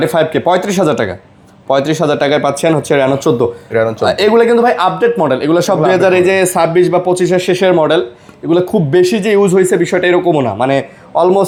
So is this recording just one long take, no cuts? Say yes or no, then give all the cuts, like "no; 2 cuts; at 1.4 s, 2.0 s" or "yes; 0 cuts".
yes; 0 cuts